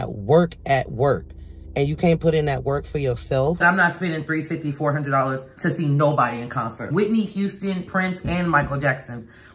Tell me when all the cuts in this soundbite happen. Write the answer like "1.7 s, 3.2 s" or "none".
3.6 s, 6.9 s

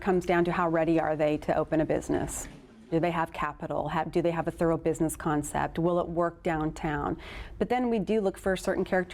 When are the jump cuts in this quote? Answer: none

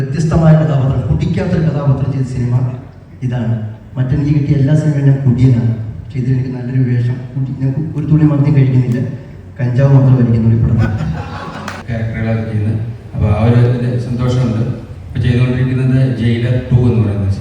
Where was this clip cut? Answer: 11.8 s

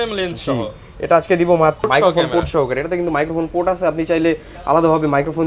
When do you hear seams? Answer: 1.9 s

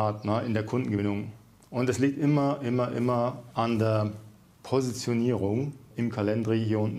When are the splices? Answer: 5.9 s

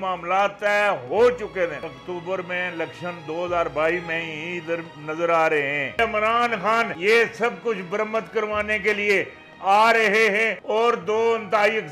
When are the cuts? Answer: 1.9 s, 6.0 s, 6.9 s, 10.5 s

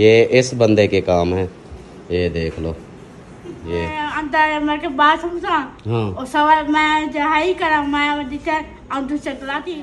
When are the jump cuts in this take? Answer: 4.0 s

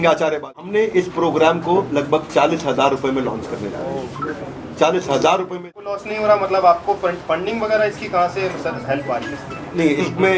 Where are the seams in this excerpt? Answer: 0.8 s, 5.7 s

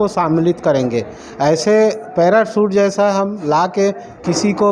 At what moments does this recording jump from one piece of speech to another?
none

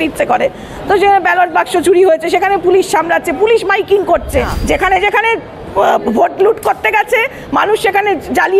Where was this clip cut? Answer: 4.6 s

